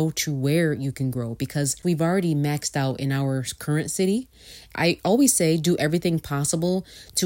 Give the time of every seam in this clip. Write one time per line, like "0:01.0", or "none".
0:01.8
0:04.6